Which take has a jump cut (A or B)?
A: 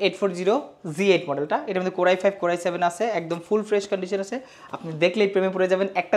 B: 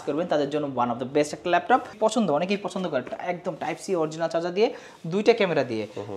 B